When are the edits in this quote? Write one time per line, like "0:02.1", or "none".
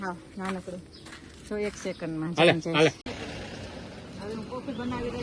0:03.0